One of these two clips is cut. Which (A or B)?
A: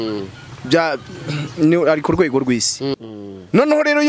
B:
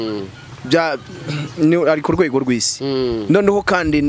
A